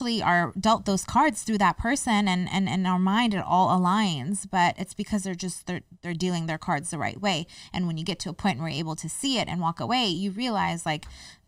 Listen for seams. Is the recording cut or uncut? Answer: uncut